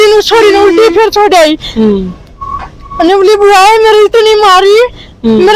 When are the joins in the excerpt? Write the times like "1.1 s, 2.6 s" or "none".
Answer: none